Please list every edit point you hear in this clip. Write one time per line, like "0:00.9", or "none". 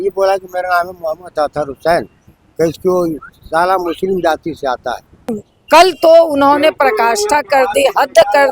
0:05.5